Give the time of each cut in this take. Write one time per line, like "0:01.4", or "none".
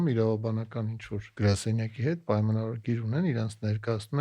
0:01.3